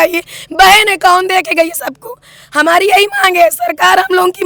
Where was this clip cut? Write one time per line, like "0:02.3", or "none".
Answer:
none

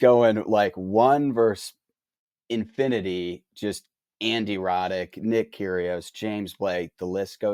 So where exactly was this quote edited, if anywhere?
none

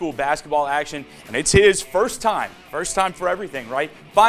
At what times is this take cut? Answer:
none

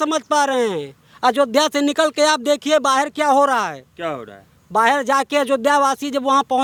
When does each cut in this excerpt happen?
none

